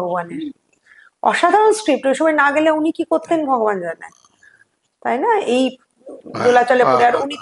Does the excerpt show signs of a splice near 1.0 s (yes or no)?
no